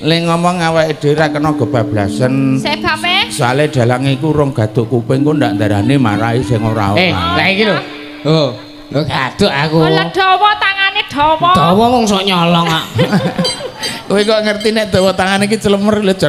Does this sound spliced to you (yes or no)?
no